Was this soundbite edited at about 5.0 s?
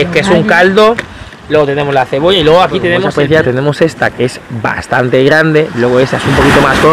no; 1 cut; at 3.0 s

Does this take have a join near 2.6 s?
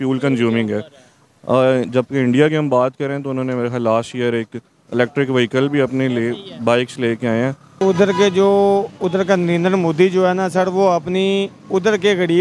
no; 1 cut; at 7.8 s

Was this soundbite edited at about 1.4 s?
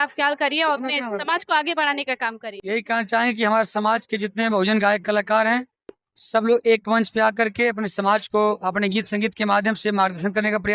no; 1 cut; at 2.7 s

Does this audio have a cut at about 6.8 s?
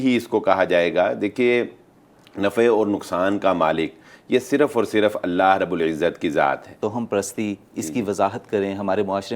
yes; 1 cut; at 6.8 s

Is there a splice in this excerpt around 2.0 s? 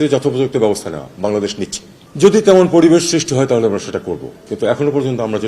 yes; 1 cut; at 2.0 s

